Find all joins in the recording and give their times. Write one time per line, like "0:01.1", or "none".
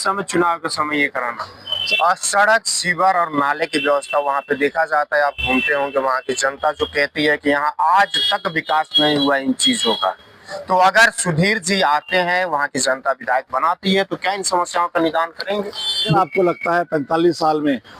0:01.8
0:16.1